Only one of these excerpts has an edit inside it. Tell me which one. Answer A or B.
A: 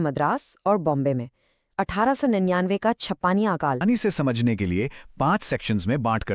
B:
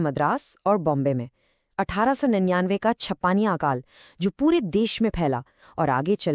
A